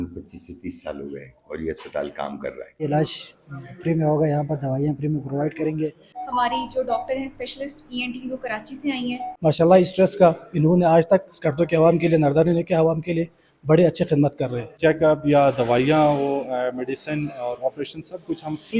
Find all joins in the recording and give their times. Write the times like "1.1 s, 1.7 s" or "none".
2.8 s, 6.1 s, 9.2 s, 14.7 s